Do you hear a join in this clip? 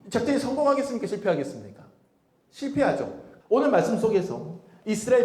yes; 1 cut; at 3.2 s

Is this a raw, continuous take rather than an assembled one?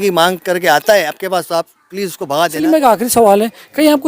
no; 1 cut; at 2.6 s

